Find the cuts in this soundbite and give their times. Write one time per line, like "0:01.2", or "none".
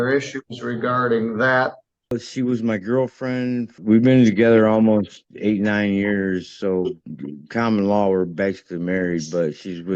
0:02.1
0:03.7